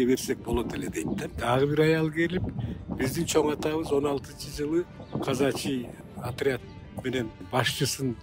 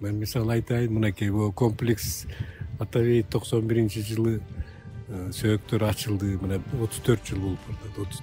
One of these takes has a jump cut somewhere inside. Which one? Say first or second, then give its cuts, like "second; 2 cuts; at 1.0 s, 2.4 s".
first; 4 cuts; at 1.2 s, 5.0 s, 6.0 s, 7.4 s